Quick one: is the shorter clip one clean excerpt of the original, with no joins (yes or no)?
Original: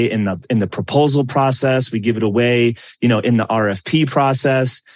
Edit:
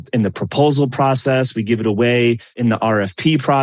no